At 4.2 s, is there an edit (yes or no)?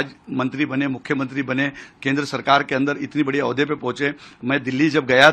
no